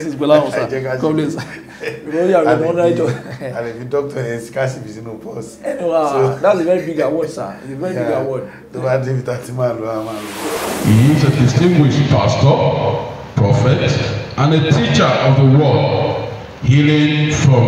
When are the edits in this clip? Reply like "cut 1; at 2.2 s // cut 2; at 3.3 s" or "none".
cut 1; at 10.6 s